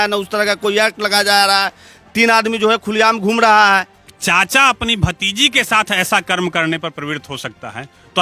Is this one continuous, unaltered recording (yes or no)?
no